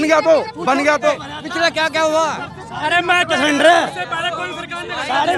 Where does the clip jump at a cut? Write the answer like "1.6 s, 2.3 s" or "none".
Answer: 1.1 s

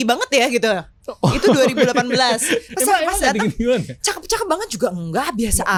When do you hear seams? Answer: none

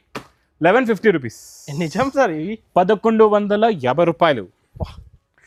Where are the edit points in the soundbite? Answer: none

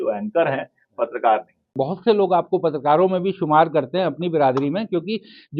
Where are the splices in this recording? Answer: 1.8 s

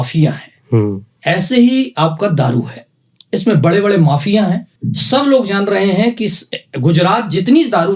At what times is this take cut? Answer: none

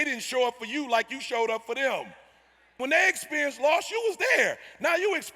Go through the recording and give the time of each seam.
2.6 s

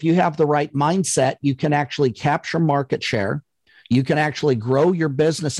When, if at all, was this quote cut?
none

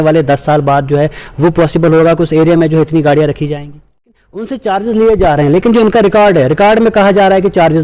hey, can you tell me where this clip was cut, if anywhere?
4.5 s

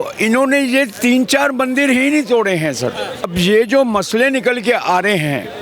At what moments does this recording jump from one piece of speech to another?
3.3 s

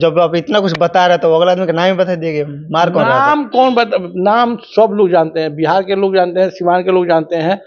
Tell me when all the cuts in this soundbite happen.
none

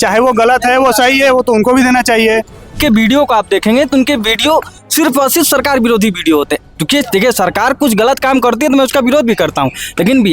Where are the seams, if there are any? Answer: 2.8 s

